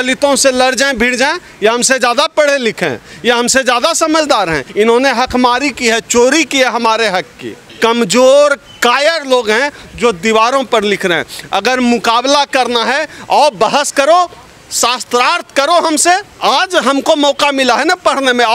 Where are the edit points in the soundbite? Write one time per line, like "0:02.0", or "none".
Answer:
0:04.6
0:07.7
0:16.3